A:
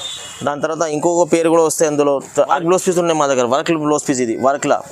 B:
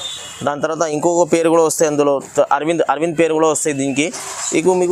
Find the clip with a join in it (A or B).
A